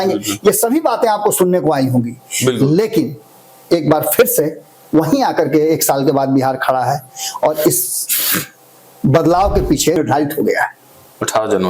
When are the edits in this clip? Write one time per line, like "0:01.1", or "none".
0:10.0

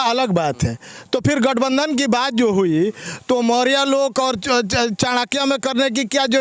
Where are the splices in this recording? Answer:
none

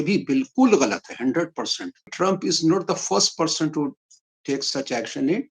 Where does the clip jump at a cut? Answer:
0:02.1

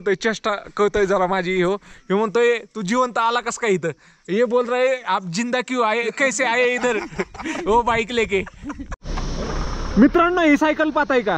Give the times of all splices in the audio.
0:08.9

